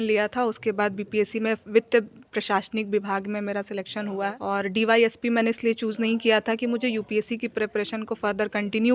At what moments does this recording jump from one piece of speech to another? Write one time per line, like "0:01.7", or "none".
0:04.4